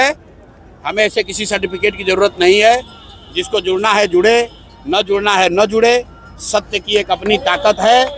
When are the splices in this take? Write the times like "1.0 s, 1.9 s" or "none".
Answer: none